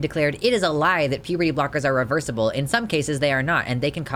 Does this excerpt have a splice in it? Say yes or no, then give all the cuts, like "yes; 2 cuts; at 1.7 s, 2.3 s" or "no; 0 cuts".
no; 0 cuts